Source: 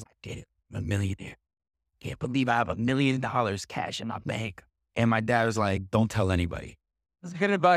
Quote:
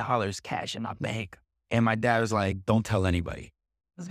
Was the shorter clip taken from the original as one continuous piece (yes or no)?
yes